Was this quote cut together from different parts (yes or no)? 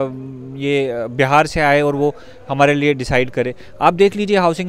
no